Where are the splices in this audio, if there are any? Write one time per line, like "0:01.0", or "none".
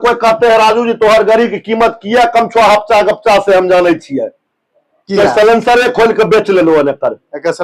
none

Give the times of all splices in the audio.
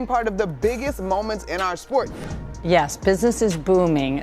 0:02.1

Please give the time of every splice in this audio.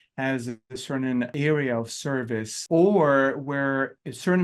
0:01.3
0:02.5

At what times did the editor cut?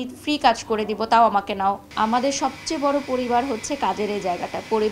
0:01.9

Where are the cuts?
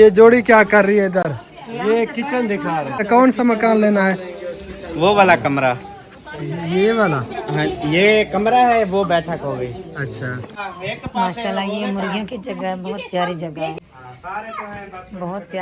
0:03.1
0:10.5
0:13.7

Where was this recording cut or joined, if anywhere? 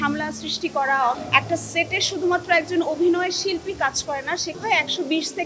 0:01.2
0:04.6

